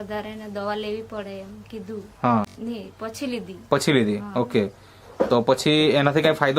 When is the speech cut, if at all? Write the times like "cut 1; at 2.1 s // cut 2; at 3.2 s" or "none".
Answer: cut 1; at 2.6 s

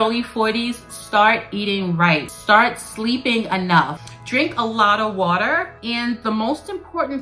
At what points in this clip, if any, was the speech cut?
cut 1; at 2.3 s // cut 2; at 4.0 s // cut 3; at 5.7 s

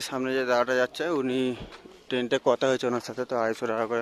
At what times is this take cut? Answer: none

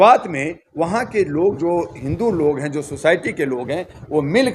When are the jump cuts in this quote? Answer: none

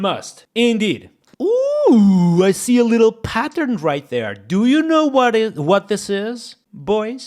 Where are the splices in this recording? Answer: cut 1; at 1.3 s

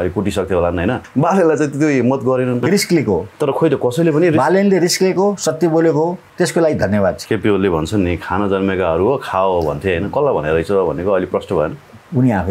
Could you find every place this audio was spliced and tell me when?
cut 1; at 1.0 s // cut 2; at 2.6 s // cut 3; at 6.3 s // cut 4; at 7.2 s

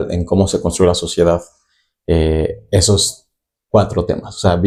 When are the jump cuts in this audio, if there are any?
none

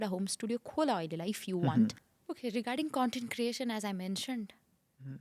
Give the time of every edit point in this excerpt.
cut 1; at 2.0 s

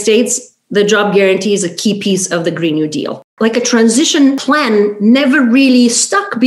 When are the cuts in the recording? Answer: cut 1; at 3.3 s // cut 2; at 4.4 s

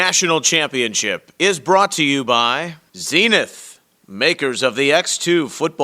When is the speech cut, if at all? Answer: cut 1; at 2.7 s

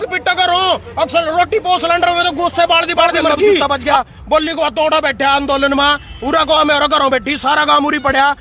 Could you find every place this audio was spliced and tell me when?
cut 1; at 3.6 s

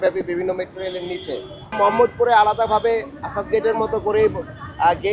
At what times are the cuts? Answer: cut 1; at 1.8 s

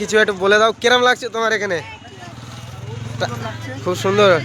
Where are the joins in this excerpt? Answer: none

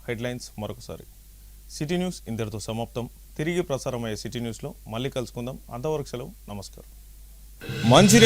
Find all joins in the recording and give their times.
cut 1; at 1.3 s // cut 2; at 7.4 s

